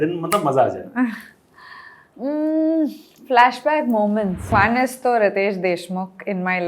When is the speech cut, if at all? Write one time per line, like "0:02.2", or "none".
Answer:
0:04.5